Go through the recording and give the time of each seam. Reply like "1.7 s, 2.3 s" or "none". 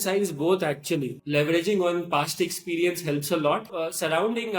1.2 s, 3.7 s

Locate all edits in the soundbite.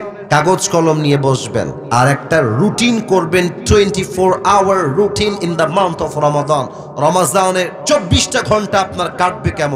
1.8 s, 7.8 s

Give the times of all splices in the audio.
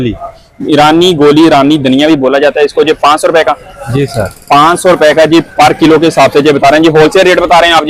none

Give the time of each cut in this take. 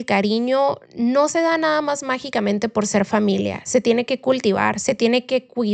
none

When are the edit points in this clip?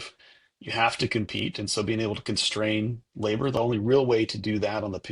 3.5 s

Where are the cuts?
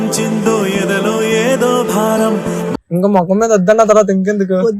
2.8 s

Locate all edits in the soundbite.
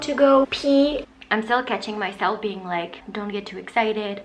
1.0 s, 3.0 s

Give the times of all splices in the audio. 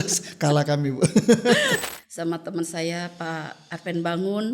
1.9 s

